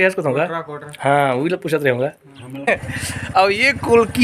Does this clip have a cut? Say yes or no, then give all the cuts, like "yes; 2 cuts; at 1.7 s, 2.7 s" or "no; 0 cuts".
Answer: yes; 1 cut; at 2.7 s